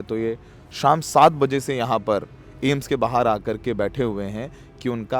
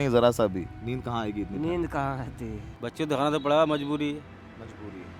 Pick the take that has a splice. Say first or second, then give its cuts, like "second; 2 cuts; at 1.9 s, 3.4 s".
second; 1 cut; at 2.7 s